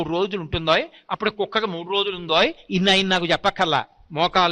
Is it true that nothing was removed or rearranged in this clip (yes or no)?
yes